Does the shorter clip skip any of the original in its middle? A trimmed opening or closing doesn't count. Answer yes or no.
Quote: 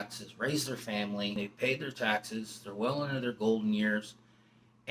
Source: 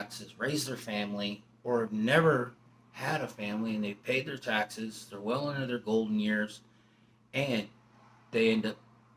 yes